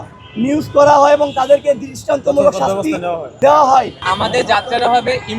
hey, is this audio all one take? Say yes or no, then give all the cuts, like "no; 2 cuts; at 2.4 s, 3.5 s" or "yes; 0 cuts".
no; 2 cuts; at 3.3 s, 4.1 s